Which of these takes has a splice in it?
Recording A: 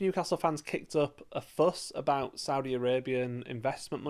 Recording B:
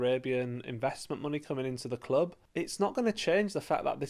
B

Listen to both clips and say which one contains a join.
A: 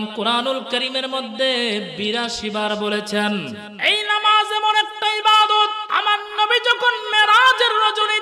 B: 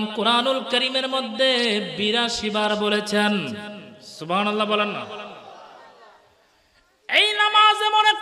A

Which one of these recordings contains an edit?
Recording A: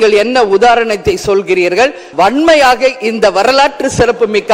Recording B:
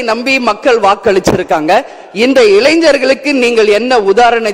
A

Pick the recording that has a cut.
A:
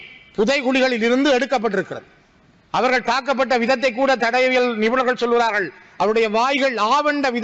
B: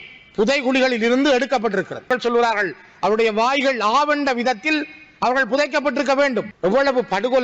B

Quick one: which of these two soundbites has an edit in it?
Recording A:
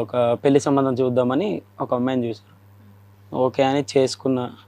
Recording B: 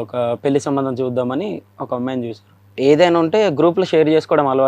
B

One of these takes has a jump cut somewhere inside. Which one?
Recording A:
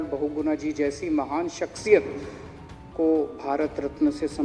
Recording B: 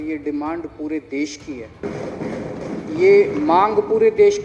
B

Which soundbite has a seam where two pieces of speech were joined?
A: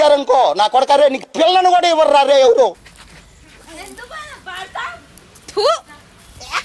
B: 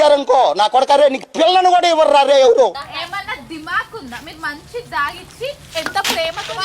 B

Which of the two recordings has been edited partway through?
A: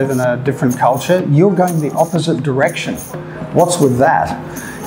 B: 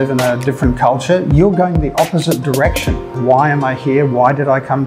B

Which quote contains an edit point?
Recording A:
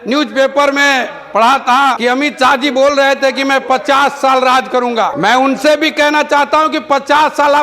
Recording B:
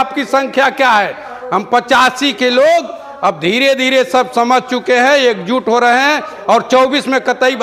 A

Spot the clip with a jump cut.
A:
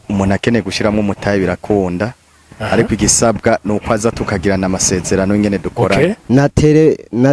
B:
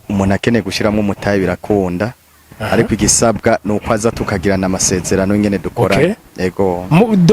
A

